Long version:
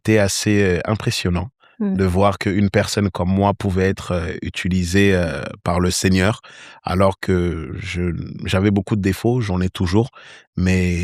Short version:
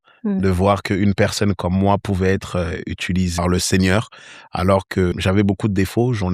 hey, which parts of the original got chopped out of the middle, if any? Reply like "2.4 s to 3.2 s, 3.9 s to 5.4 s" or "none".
4.9 s to 5.6 s, 7.4 s to 8.4 s